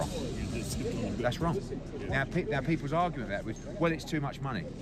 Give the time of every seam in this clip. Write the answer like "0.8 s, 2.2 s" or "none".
none